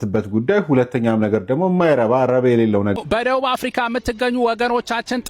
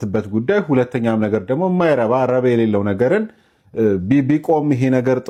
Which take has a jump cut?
first; 1 cut; at 2.9 s

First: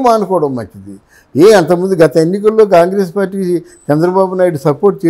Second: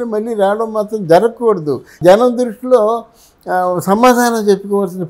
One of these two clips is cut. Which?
second; 1 cut; at 1.9 s

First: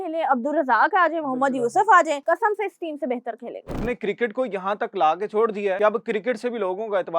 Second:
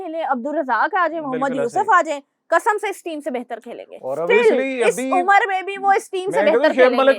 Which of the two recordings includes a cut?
first; 3 cuts; at 2.2 s, 3.8 s, 5.8 s

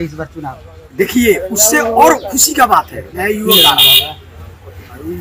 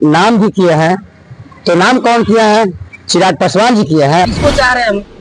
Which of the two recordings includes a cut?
second; 1 cut; at 4.3 s

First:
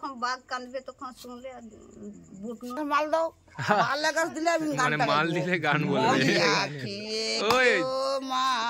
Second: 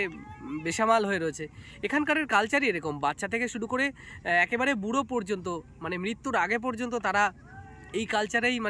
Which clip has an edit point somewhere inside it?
first; 1 cut; at 2.8 s

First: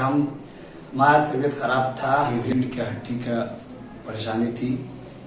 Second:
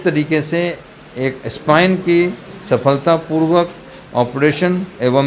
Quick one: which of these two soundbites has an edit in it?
first; 1 cut; at 2.4 s

